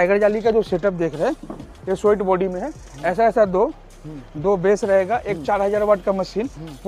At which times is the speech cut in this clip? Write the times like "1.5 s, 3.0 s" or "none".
none